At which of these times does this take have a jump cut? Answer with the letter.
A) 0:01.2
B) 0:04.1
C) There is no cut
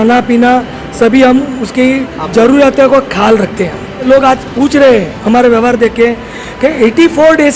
B